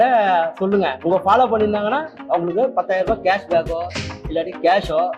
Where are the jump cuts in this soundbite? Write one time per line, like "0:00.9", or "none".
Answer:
0:01.0